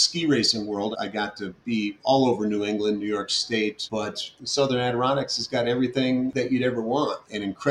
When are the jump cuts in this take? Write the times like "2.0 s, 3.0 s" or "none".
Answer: 0.9 s, 4.2 s, 6.3 s